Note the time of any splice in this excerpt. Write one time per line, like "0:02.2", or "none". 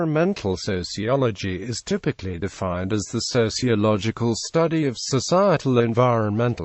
0:01.3